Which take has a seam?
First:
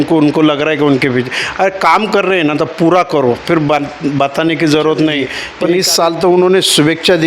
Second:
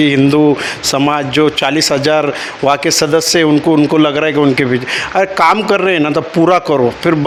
first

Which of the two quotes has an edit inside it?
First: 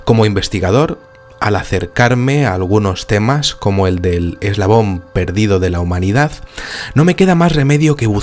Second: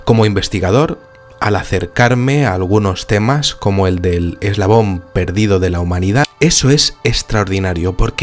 first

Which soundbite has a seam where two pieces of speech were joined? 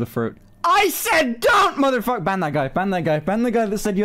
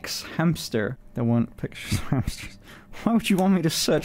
second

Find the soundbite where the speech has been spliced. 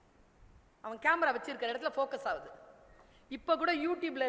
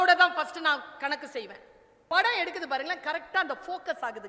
second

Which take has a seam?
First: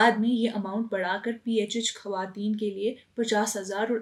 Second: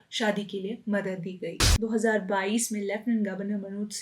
second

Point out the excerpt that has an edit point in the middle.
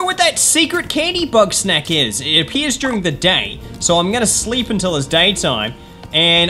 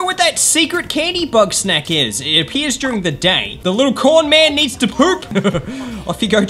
second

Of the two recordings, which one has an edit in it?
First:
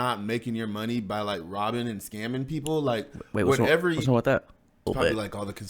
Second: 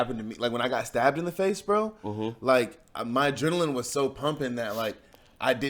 first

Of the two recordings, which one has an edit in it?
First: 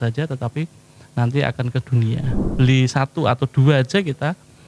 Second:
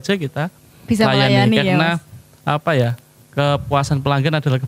first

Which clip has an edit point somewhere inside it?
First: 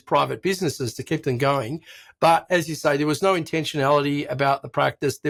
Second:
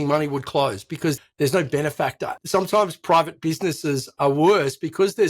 second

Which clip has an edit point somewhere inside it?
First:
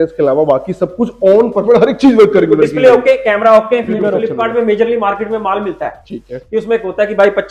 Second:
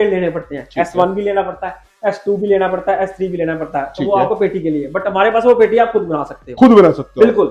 first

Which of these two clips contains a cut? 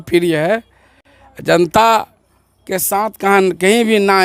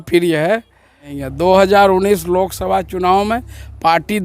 second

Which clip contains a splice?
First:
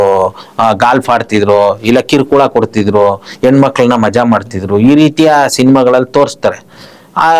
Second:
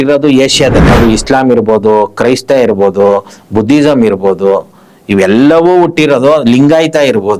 second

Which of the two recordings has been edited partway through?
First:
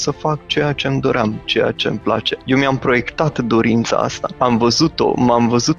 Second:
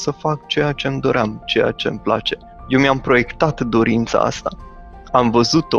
first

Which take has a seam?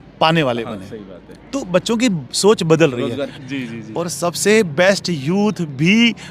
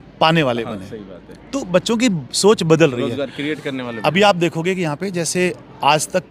first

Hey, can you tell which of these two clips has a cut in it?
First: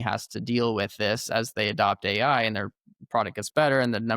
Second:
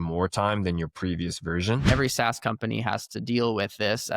second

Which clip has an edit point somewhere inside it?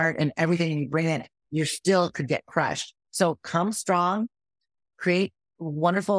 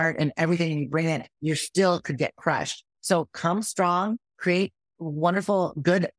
second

